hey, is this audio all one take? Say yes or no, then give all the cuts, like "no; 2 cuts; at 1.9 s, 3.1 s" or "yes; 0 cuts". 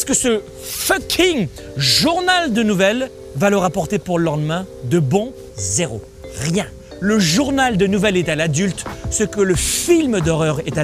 no; 3 cuts; at 3.2 s, 5.3 s, 6.8 s